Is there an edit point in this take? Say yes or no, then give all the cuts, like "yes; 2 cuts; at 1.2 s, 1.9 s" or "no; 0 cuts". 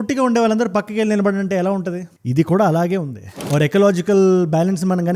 yes; 1 cut; at 3.3 s